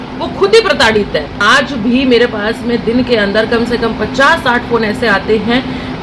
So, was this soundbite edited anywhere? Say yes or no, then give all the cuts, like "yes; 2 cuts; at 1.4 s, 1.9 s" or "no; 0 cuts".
yes; 1 cut; at 1.4 s